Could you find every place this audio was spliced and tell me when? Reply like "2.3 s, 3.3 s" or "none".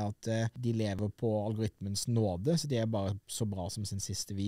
1.0 s